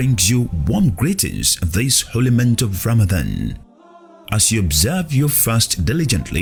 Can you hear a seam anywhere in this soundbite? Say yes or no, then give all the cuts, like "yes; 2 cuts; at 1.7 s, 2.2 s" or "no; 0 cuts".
no; 0 cuts